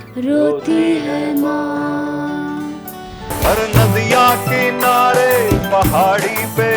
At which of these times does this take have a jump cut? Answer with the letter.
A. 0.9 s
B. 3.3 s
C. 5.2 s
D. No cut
B